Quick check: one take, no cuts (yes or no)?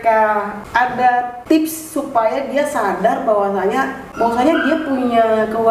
no